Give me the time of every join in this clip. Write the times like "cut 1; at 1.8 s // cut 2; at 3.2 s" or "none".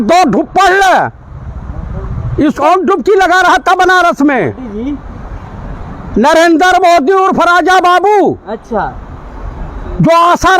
cut 1; at 2.6 s